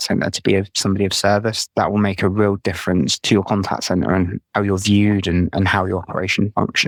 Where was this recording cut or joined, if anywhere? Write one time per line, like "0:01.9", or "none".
none